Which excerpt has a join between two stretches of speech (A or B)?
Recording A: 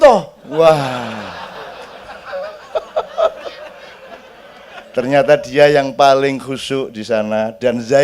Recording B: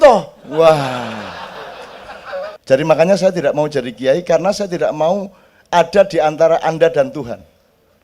B